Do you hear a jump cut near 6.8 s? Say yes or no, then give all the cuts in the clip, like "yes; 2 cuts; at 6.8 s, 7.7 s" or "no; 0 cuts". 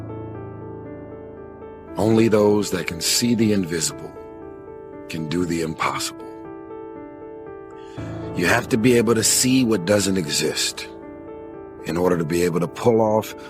no; 1 cut; at 1.3 s